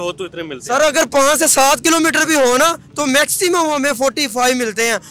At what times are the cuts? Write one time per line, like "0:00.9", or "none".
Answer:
none